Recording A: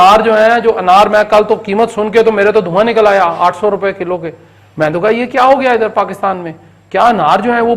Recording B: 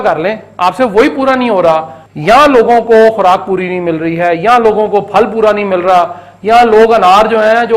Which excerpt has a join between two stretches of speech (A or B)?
B